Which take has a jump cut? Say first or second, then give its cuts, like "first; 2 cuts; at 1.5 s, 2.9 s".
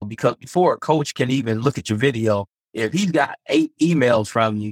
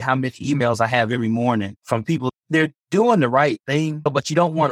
second; 1 cut; at 2.3 s